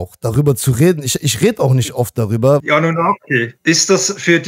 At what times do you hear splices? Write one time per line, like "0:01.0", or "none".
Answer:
0:02.6
0:03.5